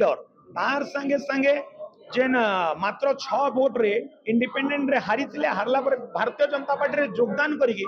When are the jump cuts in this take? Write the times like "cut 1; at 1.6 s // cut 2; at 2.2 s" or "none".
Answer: none